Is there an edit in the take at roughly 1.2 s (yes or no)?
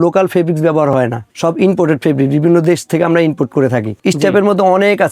no